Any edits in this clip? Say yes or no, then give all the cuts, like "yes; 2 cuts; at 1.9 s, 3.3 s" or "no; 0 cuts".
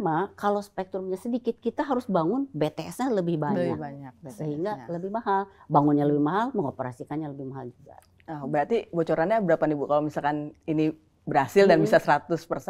no; 0 cuts